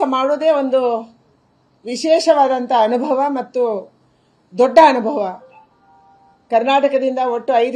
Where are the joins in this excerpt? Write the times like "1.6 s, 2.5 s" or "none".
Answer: none